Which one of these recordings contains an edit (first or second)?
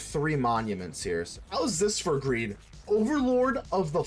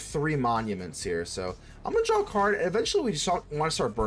first